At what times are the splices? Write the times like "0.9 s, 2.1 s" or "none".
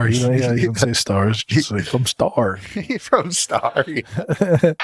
none